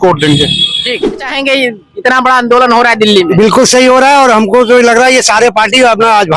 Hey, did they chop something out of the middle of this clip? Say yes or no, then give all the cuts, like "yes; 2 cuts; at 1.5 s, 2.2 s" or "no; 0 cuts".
yes; 1 cut; at 1.2 s